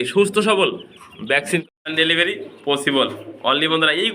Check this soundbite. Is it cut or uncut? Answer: cut